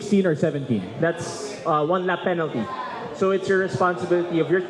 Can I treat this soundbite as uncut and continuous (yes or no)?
yes